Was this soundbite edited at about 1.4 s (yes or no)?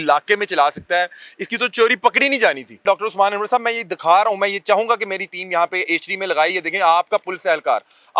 no